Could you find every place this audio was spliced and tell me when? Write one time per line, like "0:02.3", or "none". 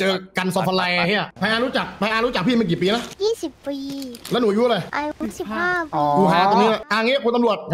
0:01.3
0:03.1
0:04.9
0:06.9